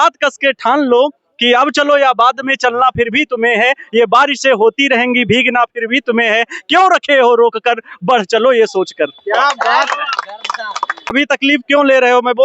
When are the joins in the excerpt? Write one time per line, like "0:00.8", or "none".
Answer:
0:11.1